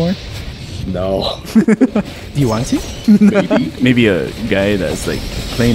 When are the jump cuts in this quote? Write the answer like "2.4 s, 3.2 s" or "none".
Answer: 2.9 s, 3.8 s